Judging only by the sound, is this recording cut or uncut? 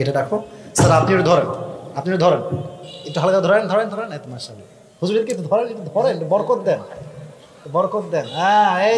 uncut